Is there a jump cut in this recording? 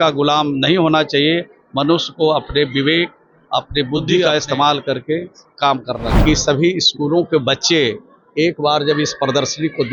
yes; 2 cuts; at 4.2 s, 6.1 s

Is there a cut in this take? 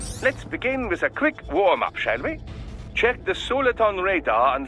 yes; 1 cut; at 2.0 s

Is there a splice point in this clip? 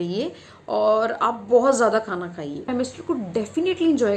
yes; 1 cut; at 2.7 s

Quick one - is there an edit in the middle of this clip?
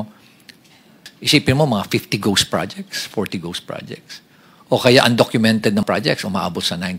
yes; 2 cuts; at 1.1 s, 5.8 s

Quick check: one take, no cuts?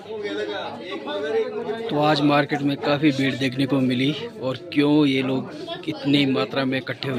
yes; 0 cuts

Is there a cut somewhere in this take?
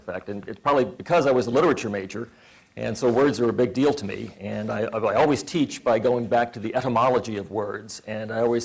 yes; 1 cut; at 1.8 s

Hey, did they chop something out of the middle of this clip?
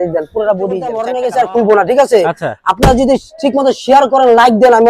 yes; 1 cut; at 1.1 s

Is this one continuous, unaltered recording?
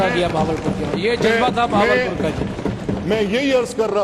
yes; 0 cuts

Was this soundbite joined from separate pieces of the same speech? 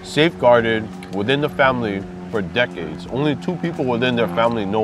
no; 0 cuts

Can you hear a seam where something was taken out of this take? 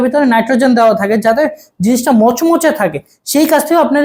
no; 0 cuts

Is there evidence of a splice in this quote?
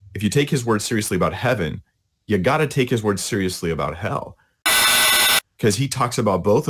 no; 0 cuts

